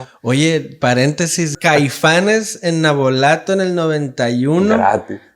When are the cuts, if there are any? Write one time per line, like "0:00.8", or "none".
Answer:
0:01.6